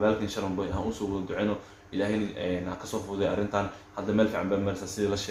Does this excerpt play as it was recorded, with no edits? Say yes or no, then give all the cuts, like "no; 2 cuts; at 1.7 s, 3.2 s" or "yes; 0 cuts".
yes; 0 cuts